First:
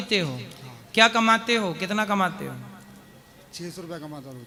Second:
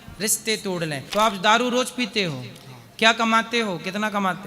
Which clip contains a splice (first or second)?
second